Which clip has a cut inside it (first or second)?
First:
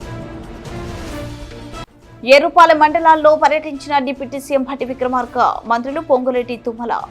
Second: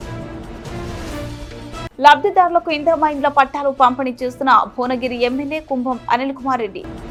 first